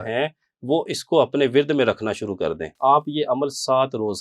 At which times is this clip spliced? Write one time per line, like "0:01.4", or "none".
0:02.7